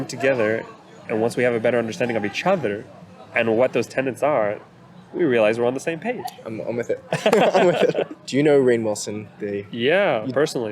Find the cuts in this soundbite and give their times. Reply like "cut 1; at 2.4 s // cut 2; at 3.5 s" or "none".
cut 1; at 8.1 s